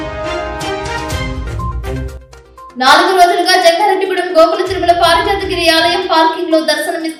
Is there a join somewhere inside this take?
no; 0 cuts

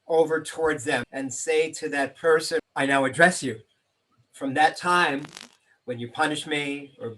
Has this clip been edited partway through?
yes; 2 cuts; at 1.1 s, 2.7 s

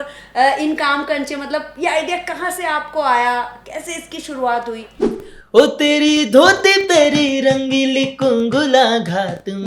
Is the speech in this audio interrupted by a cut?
yes; 1 cut; at 5.0 s

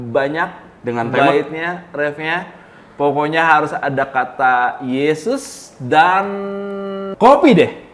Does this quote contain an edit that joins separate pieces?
yes; 1 cut; at 7.0 s

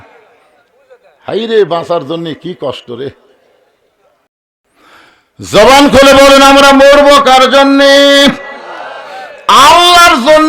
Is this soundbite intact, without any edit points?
no; 1 cut; at 4.3 s

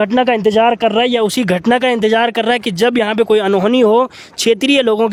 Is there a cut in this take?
no; 0 cuts

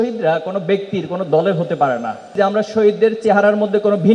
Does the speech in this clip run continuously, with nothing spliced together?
no; 1 cut; at 2.3 s

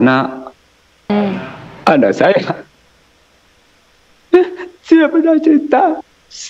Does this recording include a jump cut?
no; 0 cuts

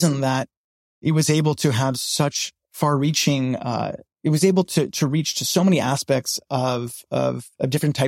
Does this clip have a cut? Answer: no; 0 cuts

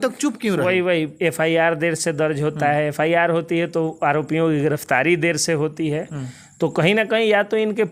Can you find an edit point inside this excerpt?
no; 0 cuts

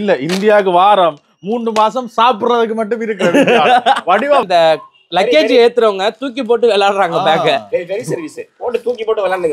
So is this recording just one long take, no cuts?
no; 1 cut; at 4.4 s

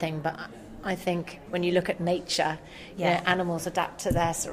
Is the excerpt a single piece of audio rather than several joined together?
no; 1 cut; at 1.4 s

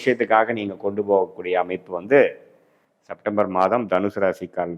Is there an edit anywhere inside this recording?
no; 0 cuts

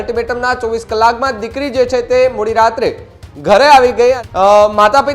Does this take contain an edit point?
yes; 1 cut; at 4.2 s

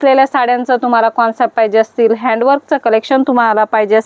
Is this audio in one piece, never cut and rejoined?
yes; 0 cuts

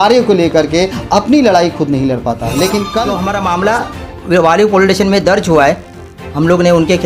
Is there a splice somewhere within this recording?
yes; 1 cut; at 3.2 s

